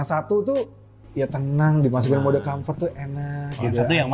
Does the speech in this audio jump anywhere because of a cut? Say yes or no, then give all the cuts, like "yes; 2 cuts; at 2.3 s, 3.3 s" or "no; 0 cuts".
yes; 1 cut; at 1.0 s